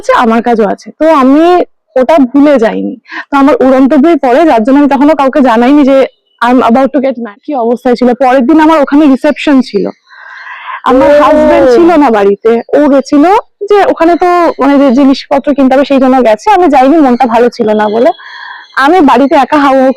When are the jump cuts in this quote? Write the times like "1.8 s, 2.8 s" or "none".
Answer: 7.4 s